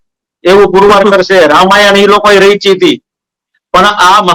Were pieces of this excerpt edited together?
no; 0 cuts

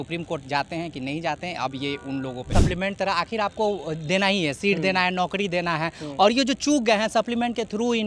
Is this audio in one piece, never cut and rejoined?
no; 1 cut; at 2.5 s

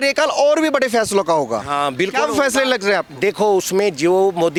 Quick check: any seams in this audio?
no; 0 cuts

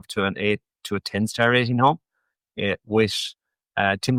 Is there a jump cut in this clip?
no; 0 cuts

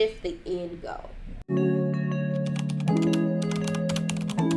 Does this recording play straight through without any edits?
no; 1 cut; at 1.5 s

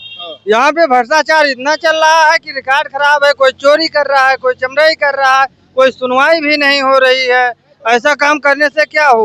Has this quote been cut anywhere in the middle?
no; 0 cuts

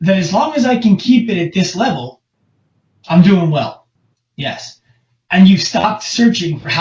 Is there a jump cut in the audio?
yes; 1 cut; at 3.9 s

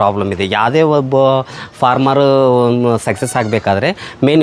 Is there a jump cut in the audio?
no; 0 cuts

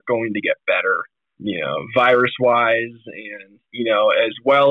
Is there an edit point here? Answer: yes; 1 cut; at 1.4 s

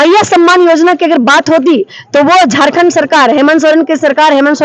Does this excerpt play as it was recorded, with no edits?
yes; 0 cuts

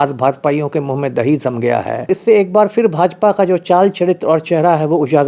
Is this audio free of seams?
no; 1 cut; at 2.1 s

